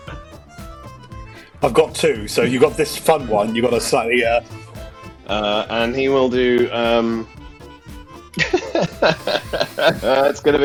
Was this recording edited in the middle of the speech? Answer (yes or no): no